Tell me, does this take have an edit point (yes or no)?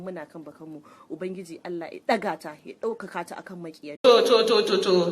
yes